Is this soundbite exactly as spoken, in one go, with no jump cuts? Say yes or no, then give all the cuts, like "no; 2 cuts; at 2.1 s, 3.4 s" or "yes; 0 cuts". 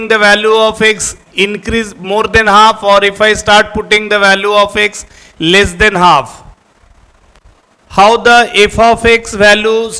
yes; 0 cuts